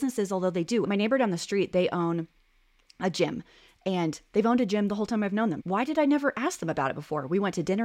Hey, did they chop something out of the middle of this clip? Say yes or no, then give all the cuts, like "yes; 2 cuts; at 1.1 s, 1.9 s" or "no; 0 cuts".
yes; 2 cuts; at 0.9 s, 5.6 s